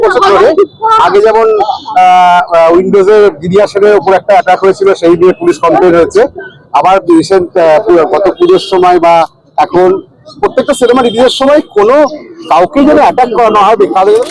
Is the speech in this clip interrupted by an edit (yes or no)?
no